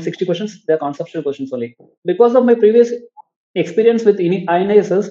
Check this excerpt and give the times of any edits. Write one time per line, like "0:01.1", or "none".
0:01.9